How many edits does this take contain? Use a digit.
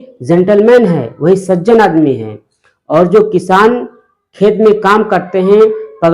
0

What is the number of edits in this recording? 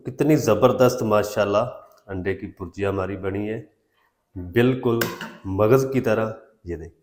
0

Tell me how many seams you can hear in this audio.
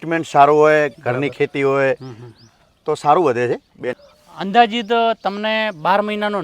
1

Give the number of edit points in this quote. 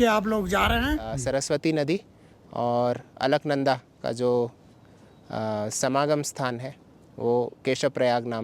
1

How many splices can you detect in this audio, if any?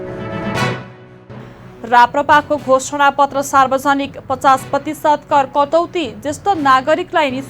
1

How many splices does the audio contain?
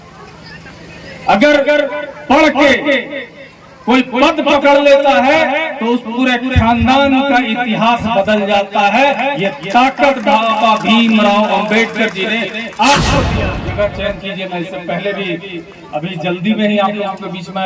1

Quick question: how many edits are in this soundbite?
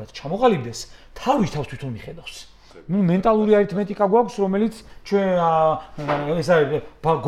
1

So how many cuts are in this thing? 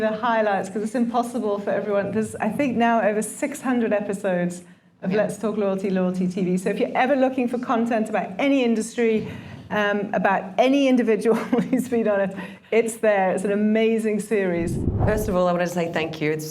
1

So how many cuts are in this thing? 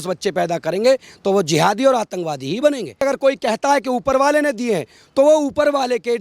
1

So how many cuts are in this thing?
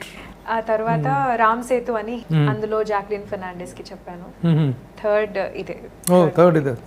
1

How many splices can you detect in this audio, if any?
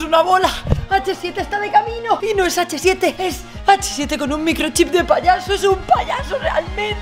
2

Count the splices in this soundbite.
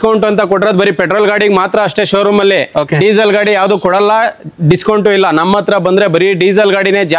0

